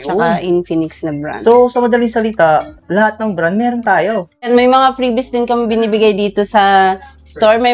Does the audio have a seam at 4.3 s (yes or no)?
yes